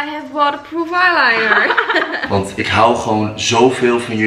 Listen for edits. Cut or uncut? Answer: cut